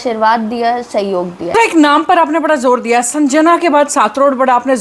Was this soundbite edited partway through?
yes; 1 cut; at 1.5 s

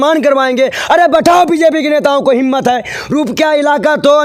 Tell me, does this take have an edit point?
no; 0 cuts

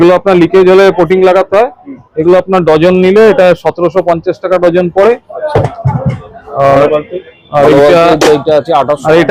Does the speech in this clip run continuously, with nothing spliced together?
yes; 0 cuts

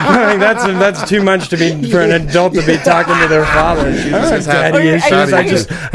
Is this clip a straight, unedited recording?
no; 1 cut; at 4.0 s

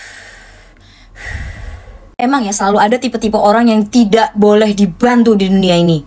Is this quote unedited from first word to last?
yes; 0 cuts

